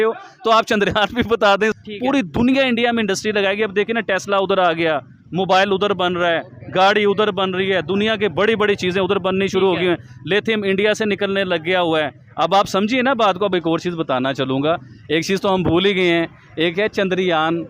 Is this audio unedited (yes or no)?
no